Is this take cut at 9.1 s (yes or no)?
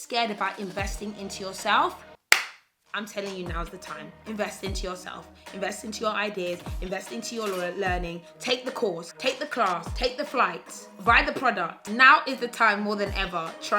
yes